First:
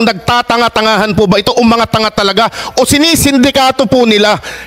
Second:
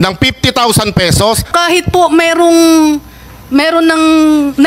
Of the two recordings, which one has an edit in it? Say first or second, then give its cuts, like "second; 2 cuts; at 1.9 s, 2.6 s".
second; 1 cut; at 1.5 s